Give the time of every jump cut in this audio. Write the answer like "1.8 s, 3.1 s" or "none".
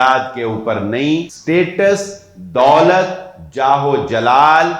1.3 s